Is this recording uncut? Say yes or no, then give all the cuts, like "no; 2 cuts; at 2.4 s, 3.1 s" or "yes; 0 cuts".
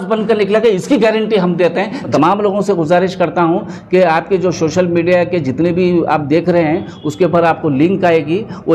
no; 1 cut; at 2.1 s